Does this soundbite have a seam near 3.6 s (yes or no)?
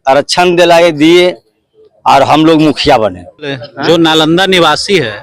yes